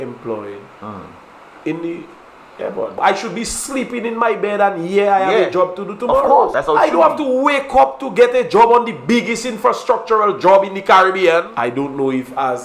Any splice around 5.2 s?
no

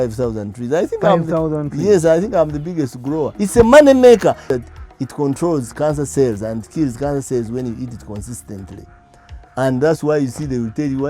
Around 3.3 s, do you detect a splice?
yes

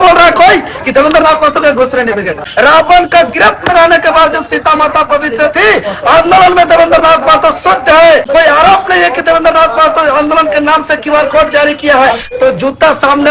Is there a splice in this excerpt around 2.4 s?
yes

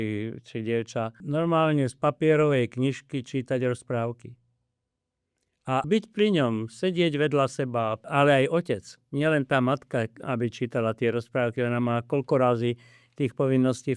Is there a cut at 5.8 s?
yes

